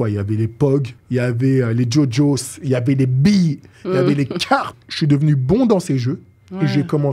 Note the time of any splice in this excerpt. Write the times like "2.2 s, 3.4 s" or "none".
1.0 s, 4.8 s